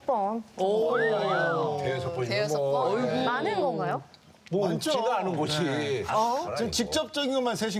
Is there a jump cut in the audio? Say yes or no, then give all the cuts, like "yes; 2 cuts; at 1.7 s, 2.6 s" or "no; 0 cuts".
no; 0 cuts